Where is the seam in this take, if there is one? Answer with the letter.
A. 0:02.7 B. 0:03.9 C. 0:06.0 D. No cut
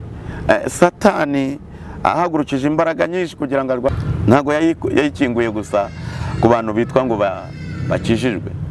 B